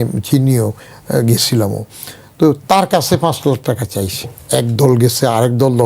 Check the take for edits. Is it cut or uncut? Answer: cut